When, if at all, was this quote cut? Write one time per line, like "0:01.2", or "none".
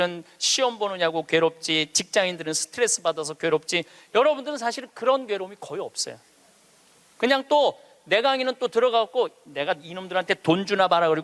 none